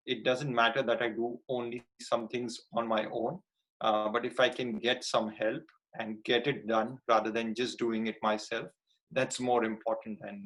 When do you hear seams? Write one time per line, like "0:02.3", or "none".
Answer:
none